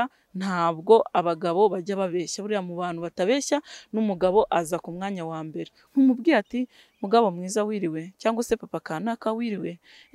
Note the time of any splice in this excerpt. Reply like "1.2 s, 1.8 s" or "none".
5.8 s